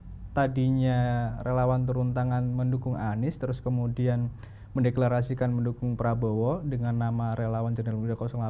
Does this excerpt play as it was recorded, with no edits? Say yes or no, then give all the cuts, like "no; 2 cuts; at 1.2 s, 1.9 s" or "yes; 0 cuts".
yes; 0 cuts